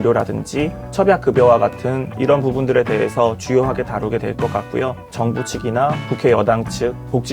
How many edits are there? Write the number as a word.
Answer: three